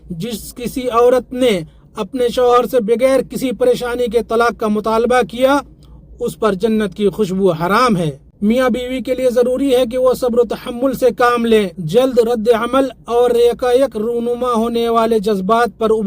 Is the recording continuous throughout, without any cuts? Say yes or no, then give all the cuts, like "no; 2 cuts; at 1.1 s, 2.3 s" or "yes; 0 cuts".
no; 2 cuts; at 8.2 s, 11.8 s